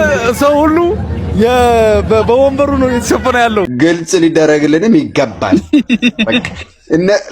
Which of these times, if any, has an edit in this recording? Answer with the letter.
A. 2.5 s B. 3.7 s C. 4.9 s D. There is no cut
B